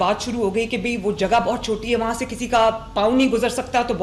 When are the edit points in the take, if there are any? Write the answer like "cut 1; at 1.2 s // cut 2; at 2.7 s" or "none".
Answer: none